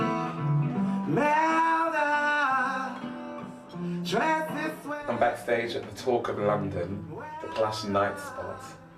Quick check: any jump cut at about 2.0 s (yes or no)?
yes